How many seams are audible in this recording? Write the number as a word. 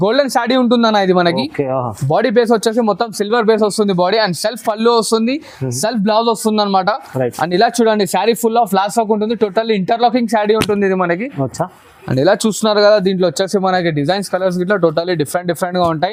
zero